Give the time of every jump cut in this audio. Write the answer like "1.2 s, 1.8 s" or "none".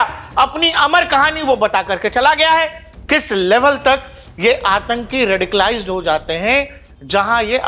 2.9 s